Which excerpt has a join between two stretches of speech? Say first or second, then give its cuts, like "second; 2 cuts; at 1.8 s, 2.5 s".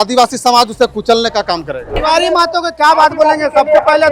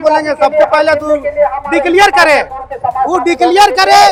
first; 1 cut; at 2.0 s